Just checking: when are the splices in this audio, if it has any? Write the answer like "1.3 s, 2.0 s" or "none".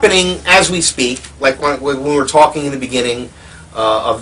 2.3 s